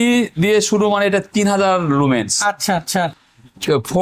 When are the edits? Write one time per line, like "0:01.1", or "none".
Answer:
none